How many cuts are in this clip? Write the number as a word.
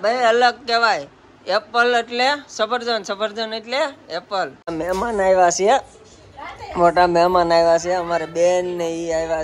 one